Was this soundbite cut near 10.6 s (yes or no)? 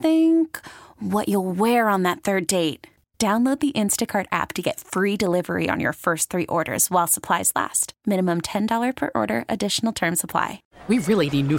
yes